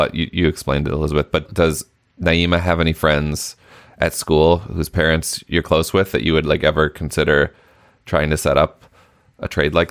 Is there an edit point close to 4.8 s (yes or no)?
no